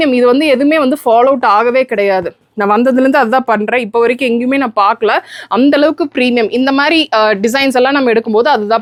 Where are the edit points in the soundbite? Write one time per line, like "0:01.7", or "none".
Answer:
none